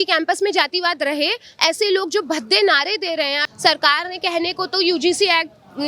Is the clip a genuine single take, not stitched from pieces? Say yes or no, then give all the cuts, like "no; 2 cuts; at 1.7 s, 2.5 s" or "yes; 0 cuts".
no; 1 cut; at 3.4 s